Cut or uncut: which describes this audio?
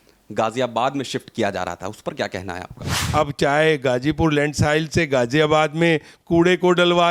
cut